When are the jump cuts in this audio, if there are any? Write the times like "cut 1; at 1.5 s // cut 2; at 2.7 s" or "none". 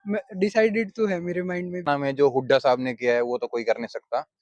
cut 1; at 1.9 s